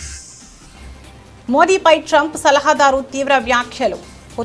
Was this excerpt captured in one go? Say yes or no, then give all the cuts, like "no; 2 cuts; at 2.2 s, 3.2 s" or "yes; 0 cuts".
no; 1 cut; at 1.3 s